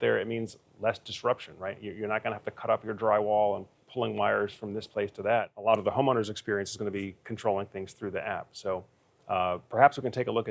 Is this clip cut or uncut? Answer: cut